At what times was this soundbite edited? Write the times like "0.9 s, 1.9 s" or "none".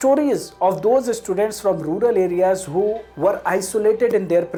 none